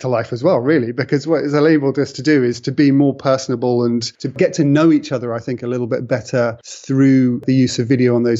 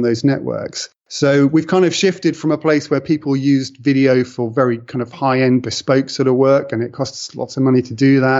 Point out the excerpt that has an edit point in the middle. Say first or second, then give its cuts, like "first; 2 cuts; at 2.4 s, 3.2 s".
first; 2 cuts; at 4.3 s, 6.7 s